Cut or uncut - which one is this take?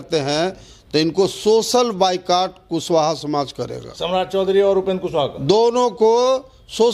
uncut